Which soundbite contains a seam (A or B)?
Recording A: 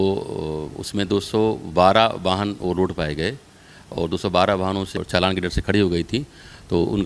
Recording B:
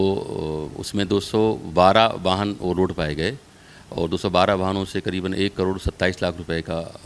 A